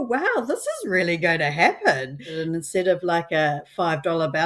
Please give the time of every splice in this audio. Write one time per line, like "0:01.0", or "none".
0:02.4